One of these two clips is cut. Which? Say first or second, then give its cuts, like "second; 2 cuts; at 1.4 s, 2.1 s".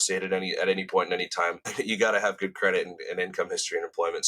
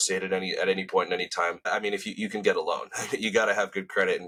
first; 1 cut; at 1.6 s